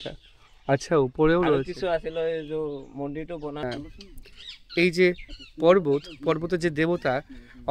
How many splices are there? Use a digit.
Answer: 1